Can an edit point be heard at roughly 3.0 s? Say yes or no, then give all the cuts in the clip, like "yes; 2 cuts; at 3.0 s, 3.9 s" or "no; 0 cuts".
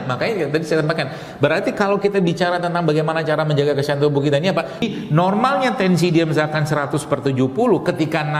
no; 1 cut; at 4.8 s